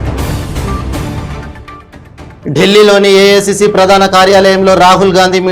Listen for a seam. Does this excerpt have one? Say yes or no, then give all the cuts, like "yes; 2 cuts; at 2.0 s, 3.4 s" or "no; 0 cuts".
yes; 1 cut; at 1.2 s